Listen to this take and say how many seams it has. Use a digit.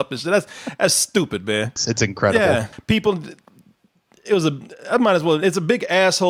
2